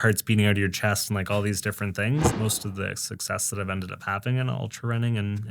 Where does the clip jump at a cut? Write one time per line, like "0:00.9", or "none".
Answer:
0:02.3